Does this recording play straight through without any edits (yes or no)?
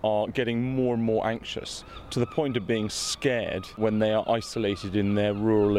no